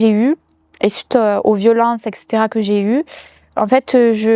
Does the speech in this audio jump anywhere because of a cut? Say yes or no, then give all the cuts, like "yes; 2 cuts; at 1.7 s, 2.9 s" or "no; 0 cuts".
no; 0 cuts